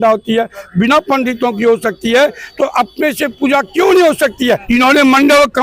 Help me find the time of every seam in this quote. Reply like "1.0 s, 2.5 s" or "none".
4.4 s